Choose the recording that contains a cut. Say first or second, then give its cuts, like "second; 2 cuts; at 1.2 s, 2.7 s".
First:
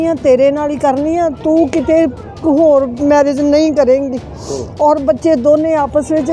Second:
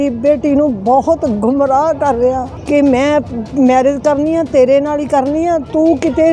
second; 1 cut; at 2.5 s